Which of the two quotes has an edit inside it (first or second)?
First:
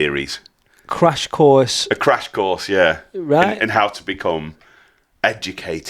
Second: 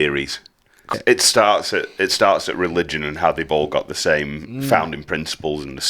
second